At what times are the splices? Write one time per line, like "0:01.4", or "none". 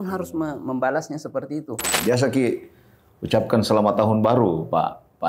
0:01.9

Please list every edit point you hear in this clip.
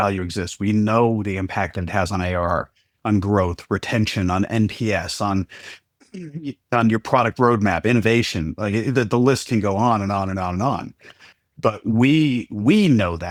none

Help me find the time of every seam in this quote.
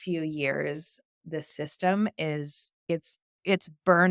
0:01.2
0:02.9

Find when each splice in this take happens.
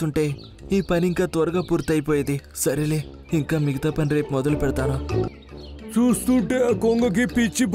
0:05.3

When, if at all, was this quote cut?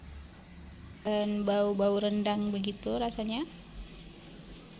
0:01.1

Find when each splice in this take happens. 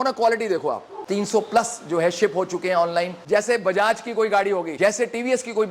0:00.9
0:03.2
0:04.7

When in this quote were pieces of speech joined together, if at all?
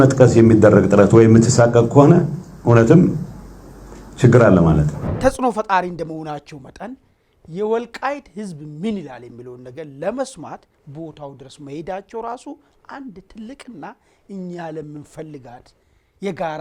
0:05.0

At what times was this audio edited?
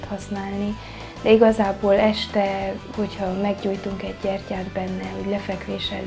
none

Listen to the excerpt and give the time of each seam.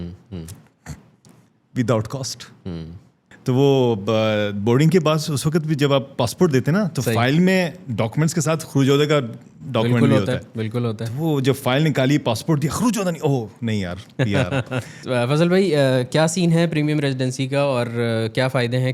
0:03.3
0:15.0

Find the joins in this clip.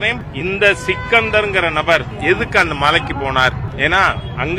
none

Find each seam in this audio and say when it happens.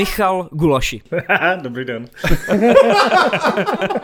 0:01.0

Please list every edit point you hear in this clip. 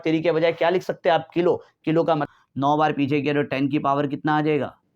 0:02.3

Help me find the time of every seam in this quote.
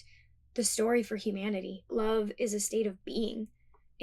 0:01.9

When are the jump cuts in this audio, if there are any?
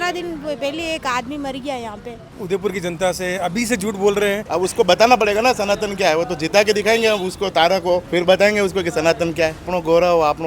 0:02.4
0:04.4
0:09.7

